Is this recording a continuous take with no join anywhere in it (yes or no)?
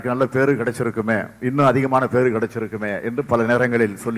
yes